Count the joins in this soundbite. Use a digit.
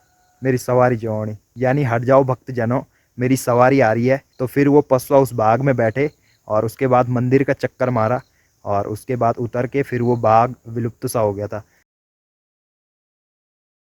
0